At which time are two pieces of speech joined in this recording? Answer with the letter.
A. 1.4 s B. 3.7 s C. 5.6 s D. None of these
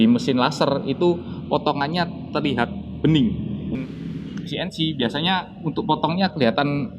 B